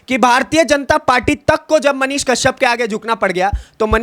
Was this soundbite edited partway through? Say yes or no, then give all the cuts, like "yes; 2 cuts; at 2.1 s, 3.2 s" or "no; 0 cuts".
no; 0 cuts